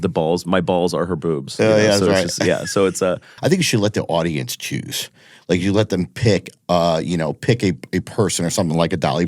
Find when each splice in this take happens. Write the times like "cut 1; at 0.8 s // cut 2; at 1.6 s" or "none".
cut 1; at 3.3 s